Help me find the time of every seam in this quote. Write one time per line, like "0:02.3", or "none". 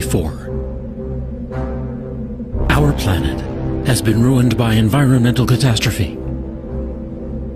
none